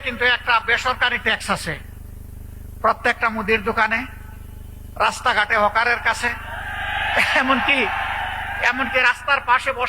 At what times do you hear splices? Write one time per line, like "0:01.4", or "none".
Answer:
none